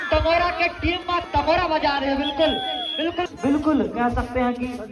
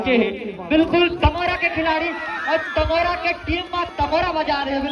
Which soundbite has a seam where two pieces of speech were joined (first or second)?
first